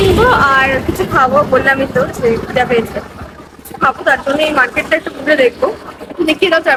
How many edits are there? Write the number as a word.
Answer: zero